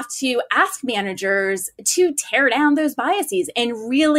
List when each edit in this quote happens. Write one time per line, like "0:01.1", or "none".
none